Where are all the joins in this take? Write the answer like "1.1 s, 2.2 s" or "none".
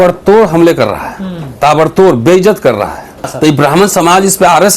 3.3 s